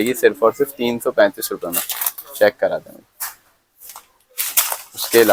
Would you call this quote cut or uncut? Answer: uncut